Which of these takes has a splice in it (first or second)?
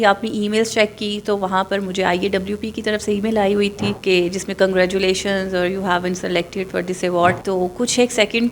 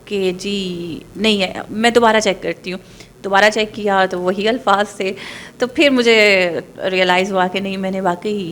first